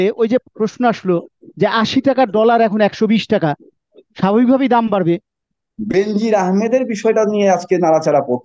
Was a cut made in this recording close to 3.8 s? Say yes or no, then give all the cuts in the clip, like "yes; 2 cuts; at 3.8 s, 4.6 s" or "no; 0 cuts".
no; 1 cut; at 5.5 s